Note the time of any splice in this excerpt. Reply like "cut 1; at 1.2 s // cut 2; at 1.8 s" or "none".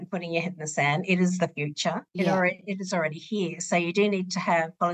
none